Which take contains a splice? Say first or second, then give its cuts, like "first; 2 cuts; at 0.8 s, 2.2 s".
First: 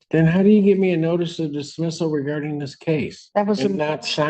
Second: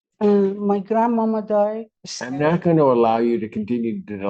second; 1 cut; at 1.9 s